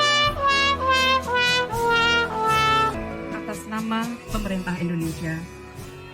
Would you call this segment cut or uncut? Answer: cut